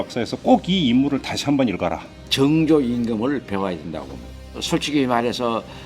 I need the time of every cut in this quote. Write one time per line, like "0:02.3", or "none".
0:02.2
0:04.6